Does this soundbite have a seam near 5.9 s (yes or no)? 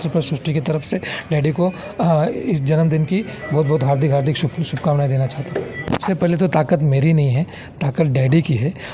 yes